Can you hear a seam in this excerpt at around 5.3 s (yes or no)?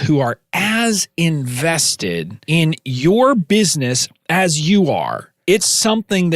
yes